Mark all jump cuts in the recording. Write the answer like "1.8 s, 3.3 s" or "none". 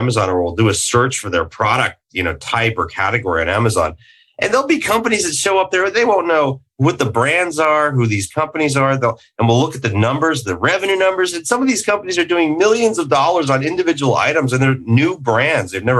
none